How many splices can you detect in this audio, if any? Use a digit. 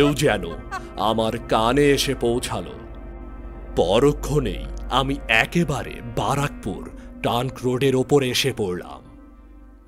1